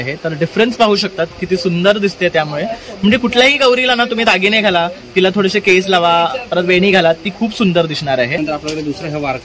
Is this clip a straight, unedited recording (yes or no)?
no